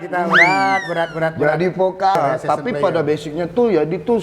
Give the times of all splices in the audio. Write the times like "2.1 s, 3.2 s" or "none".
2.2 s